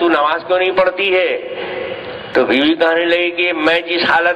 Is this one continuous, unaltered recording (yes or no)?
yes